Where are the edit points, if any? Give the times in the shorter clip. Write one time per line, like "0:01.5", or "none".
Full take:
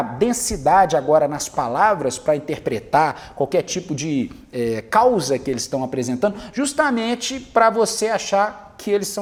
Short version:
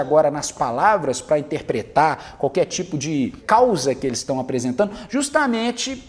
0:03.4